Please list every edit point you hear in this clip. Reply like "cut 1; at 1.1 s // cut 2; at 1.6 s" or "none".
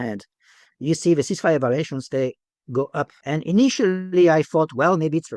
cut 1; at 3.2 s